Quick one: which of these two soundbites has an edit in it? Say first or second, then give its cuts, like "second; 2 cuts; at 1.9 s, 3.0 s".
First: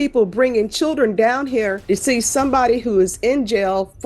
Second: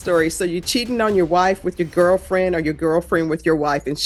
first; 1 cut; at 1.8 s